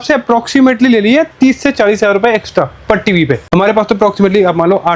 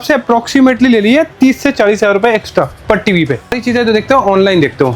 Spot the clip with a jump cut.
second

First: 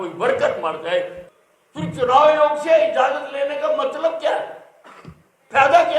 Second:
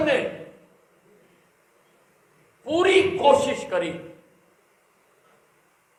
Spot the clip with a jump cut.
first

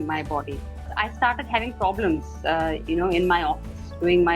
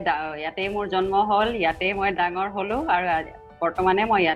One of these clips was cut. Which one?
first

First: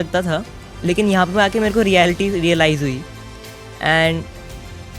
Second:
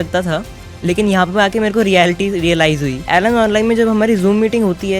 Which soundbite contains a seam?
second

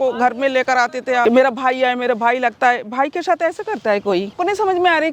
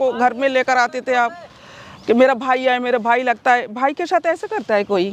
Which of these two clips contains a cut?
first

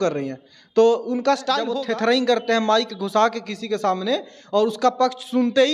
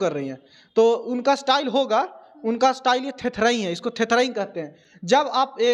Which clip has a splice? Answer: first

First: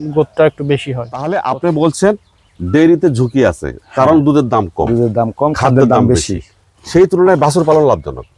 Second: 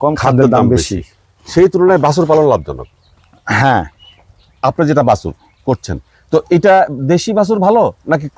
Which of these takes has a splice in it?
first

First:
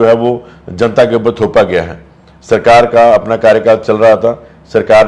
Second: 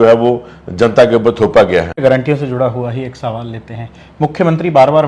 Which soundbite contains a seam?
second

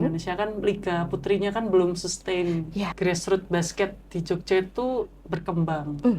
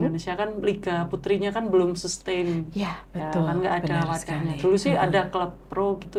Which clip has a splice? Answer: first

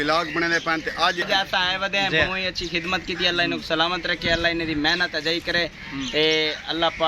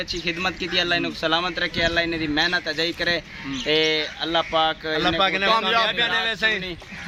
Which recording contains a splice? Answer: first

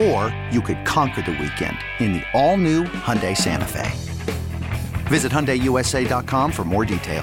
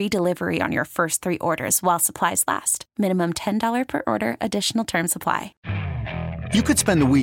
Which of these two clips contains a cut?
second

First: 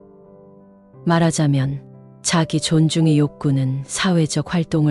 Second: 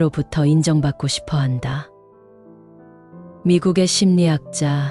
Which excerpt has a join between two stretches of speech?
second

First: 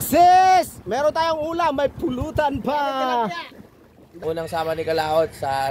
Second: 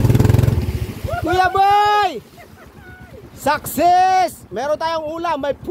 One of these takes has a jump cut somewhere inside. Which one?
first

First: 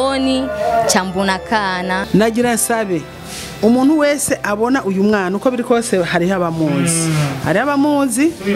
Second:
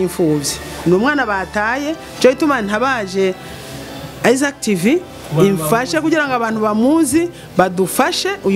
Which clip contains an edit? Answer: first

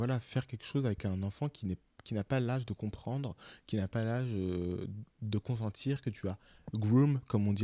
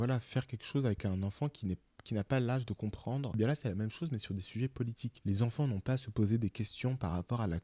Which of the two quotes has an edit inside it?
second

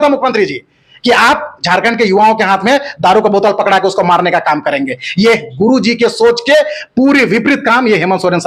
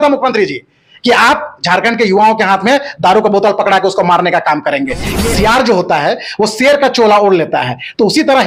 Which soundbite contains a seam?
second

